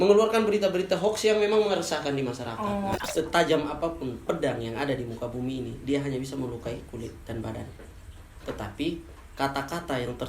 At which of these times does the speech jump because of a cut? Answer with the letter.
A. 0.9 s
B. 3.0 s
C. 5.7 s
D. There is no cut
B